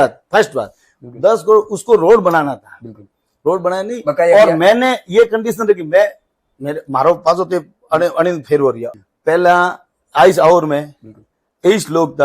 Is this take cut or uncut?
cut